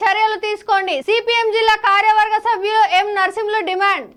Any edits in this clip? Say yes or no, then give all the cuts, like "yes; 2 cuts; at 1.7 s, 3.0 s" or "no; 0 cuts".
no; 0 cuts